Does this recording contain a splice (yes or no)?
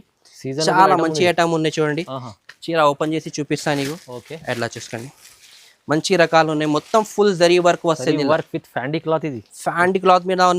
no